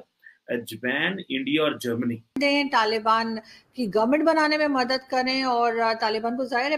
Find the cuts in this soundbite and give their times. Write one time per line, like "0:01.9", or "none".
0:02.4